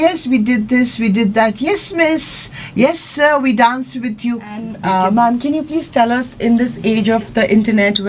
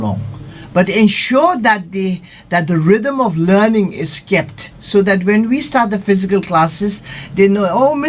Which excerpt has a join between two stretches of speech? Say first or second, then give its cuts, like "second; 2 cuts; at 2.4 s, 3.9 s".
first; 1 cut; at 4.7 s